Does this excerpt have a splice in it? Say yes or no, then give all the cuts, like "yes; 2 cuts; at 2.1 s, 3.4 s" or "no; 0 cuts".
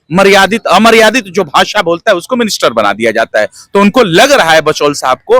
no; 0 cuts